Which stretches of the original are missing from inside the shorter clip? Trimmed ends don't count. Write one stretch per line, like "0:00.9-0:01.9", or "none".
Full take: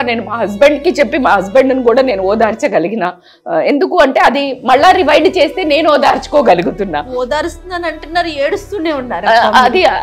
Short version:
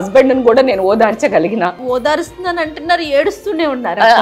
0:03.2-0:07.1